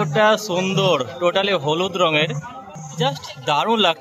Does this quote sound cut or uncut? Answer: uncut